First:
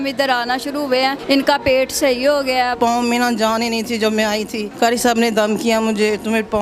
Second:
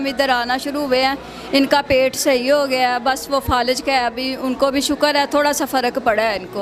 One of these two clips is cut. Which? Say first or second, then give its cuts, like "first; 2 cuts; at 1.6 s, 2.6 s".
first; 3 cuts; at 1.2 s, 2.8 s, 4.6 s